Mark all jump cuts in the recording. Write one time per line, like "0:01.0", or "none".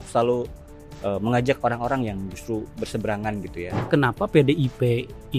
0:03.8